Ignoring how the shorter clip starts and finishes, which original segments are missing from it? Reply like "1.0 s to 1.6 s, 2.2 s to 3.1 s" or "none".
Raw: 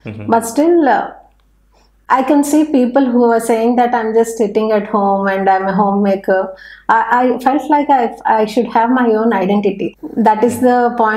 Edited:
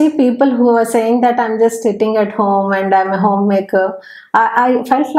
none